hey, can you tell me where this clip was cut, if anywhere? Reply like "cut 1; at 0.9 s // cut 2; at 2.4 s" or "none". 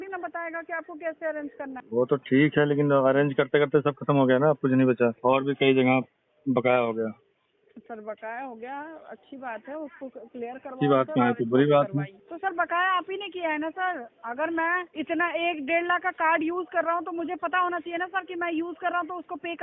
cut 1; at 1.8 s // cut 2; at 5.2 s // cut 3; at 12.2 s // cut 4; at 14.9 s